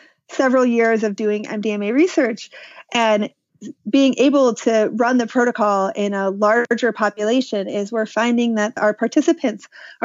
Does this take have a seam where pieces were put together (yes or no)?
yes